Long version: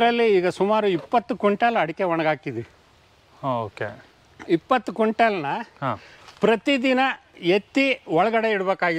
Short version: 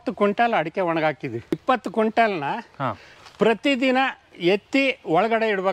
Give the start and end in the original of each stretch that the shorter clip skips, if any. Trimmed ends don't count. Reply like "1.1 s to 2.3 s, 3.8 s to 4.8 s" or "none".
2.8 s to 4.6 s